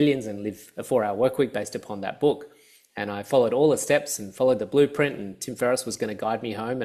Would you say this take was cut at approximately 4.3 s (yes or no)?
no